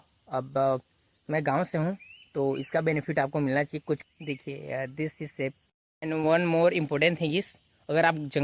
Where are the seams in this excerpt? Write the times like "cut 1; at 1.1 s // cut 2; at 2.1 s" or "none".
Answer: cut 1; at 4.0 s // cut 2; at 5.6 s